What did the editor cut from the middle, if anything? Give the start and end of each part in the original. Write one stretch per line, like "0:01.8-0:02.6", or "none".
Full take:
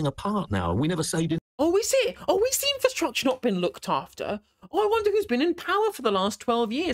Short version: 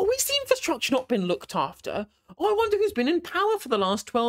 none

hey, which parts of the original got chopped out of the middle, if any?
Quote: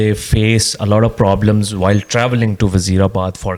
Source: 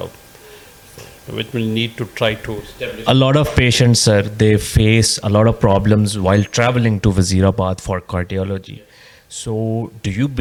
none

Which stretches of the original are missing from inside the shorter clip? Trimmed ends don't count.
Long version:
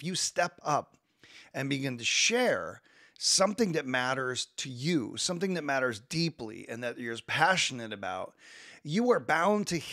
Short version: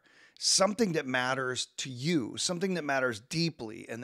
none

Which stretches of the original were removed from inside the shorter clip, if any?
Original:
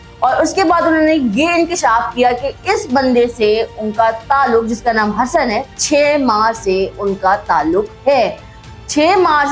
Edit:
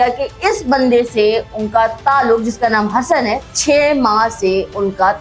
none

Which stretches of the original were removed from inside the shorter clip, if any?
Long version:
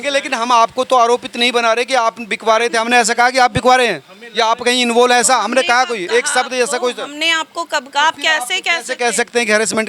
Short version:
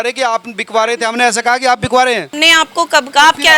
0:04.0-0:07.1

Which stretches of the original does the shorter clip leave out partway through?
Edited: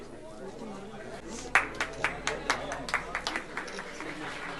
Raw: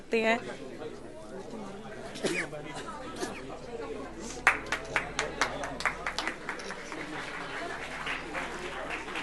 0:02.1-0:04.1

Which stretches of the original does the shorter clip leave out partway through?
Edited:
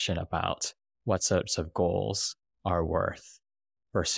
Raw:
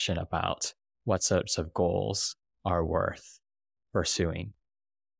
none

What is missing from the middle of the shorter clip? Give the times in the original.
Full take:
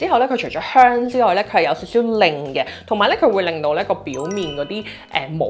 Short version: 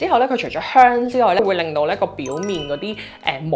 0:01.4-0:03.3

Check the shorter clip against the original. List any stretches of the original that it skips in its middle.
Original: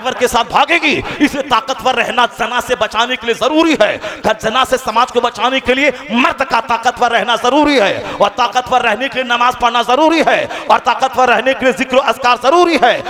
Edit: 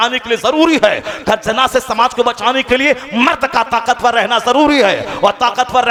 none

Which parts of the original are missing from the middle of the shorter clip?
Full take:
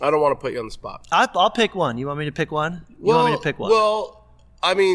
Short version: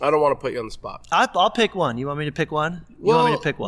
none

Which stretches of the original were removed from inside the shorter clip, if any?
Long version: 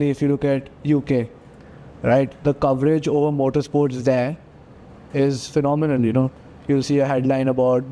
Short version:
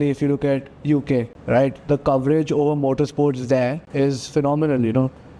0:01.3-0:01.9
0:04.4-0:05.0

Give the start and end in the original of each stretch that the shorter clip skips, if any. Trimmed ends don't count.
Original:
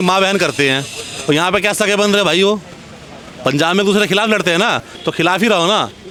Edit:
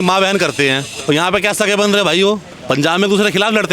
0:00.9-0:01.1
0:02.7-0:03.3

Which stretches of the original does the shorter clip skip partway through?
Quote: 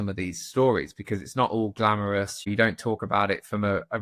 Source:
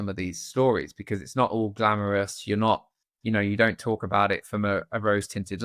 0:02.5-0:03.5

